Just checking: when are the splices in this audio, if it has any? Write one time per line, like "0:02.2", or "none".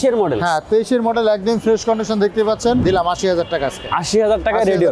0:02.8